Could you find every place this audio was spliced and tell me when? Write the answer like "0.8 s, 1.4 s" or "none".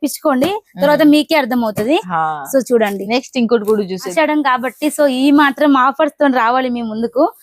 4.1 s